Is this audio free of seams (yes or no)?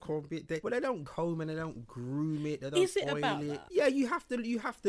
no